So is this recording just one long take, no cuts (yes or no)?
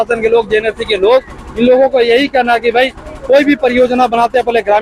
yes